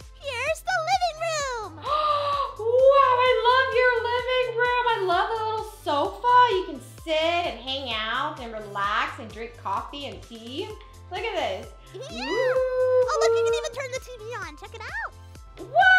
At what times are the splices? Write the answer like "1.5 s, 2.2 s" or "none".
none